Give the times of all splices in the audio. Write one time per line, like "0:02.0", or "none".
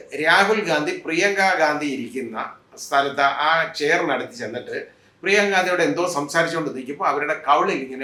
none